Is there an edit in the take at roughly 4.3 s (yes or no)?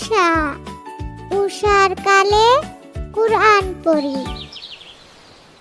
yes